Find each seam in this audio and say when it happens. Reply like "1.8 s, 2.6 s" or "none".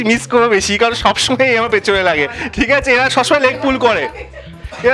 none